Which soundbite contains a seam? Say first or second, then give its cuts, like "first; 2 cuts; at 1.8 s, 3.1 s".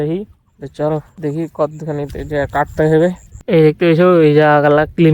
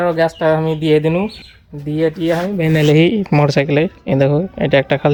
first; 2 cuts; at 1.1 s, 3.3 s